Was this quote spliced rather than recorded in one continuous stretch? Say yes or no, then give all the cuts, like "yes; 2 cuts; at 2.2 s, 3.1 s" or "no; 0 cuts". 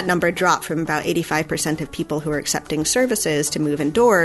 no; 0 cuts